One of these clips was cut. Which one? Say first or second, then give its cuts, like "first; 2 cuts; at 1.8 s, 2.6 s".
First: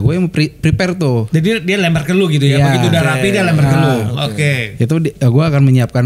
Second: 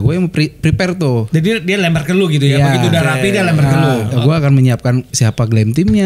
second; 1 cut; at 4.1 s